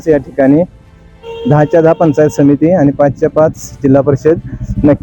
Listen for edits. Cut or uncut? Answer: uncut